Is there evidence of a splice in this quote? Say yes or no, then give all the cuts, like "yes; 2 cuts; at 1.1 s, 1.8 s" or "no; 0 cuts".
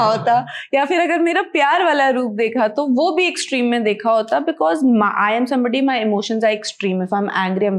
no; 0 cuts